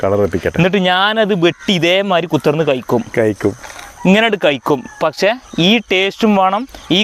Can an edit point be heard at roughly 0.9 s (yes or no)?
no